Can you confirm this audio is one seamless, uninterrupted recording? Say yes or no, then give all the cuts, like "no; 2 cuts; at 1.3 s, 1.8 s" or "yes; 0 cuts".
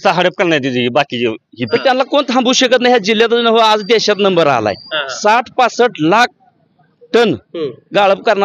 no; 1 cut; at 1.6 s